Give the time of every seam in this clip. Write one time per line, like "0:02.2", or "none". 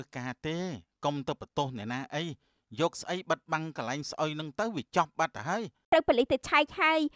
0:05.9